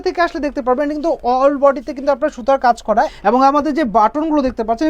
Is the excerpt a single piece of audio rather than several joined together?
no; 1 cut; at 3.1 s

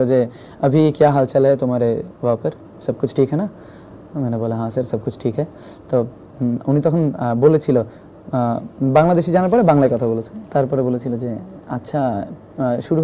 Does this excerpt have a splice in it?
no; 0 cuts

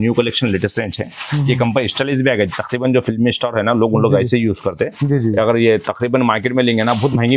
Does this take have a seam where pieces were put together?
no; 0 cuts

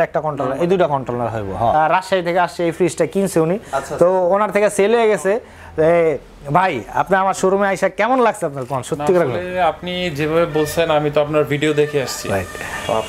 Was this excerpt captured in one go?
no; 1 cut; at 1.7 s

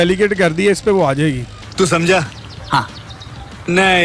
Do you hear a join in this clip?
no; 0 cuts

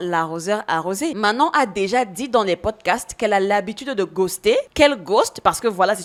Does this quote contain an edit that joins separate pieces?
no; 0 cuts

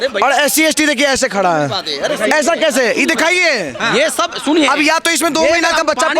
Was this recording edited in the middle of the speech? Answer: no; 0 cuts

